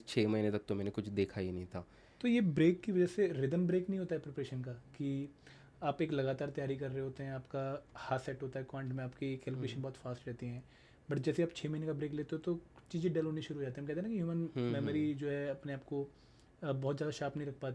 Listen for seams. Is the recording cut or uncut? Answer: cut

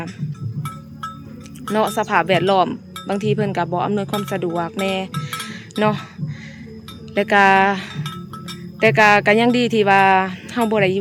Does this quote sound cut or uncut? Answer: uncut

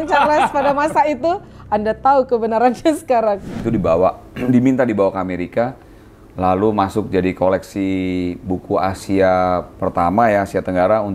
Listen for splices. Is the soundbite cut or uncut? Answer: cut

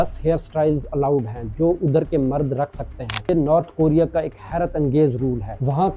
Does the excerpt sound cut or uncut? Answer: cut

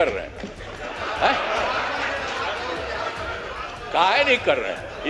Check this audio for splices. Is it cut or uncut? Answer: uncut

